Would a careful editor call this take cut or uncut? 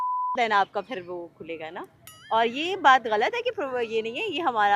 uncut